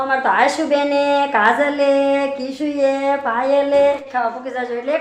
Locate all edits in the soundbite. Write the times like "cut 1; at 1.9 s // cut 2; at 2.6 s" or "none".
cut 1; at 4.0 s